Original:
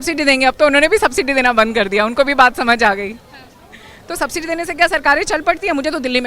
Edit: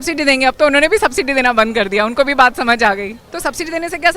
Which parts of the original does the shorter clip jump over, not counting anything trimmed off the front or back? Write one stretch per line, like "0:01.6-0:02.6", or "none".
0:03.2-0:04.0